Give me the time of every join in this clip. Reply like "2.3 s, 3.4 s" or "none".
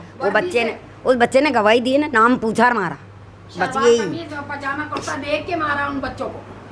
none